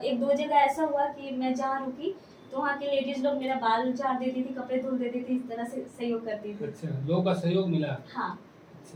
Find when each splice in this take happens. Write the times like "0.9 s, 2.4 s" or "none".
none